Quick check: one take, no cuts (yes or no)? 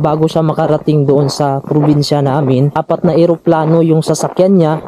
no